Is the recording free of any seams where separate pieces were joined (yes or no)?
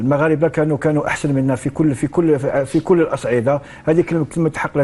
yes